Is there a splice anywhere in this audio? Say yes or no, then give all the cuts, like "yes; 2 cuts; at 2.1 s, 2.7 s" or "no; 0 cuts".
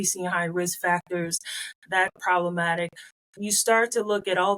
yes; 1 cut; at 2.1 s